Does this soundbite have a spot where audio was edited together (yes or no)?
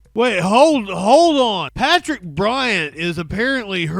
yes